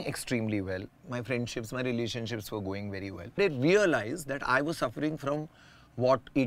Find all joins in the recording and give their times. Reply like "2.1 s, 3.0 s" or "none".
3.3 s